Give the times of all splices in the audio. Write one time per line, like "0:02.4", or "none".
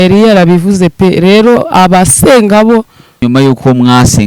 0:03.2